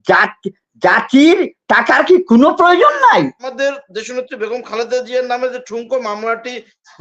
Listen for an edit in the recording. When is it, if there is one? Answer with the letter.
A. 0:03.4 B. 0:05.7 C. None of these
A